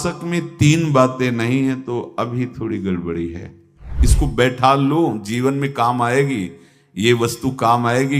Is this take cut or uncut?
cut